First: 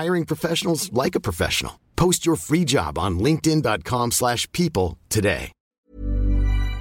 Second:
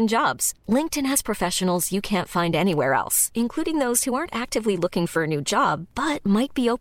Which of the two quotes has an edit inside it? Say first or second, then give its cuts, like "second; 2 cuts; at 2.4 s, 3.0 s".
first; 1 cut; at 5.6 s